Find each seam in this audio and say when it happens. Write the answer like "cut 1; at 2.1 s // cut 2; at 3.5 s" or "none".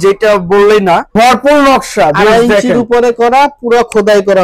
cut 1; at 1.1 s